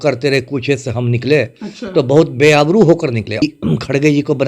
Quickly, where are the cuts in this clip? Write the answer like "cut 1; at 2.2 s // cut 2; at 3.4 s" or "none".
cut 1; at 3.4 s